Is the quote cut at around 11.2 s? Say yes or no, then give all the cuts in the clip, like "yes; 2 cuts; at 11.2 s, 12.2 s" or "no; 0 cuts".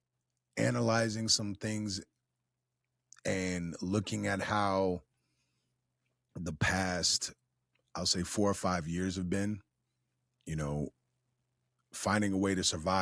no; 0 cuts